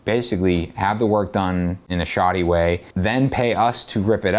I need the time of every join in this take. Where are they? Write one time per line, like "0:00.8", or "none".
0:01.9
0:02.9